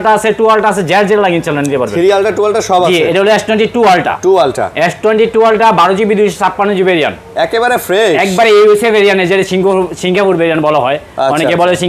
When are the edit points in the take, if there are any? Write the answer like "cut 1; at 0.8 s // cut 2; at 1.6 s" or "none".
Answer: none